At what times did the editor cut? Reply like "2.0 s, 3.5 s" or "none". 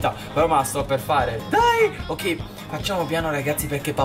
none